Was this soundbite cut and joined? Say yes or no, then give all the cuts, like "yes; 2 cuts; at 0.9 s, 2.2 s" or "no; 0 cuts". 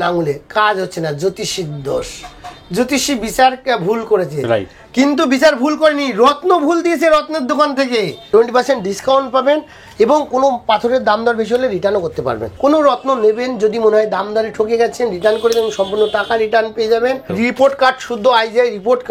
yes; 3 cuts; at 8.2 s, 12.5 s, 17.3 s